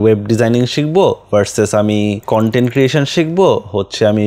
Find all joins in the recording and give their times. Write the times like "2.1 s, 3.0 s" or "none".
2.2 s